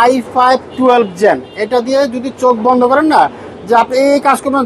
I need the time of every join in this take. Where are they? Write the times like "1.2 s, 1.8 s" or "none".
none